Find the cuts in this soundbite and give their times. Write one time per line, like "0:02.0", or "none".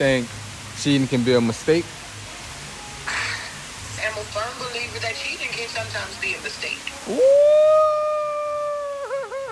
0:02.2
0:04.0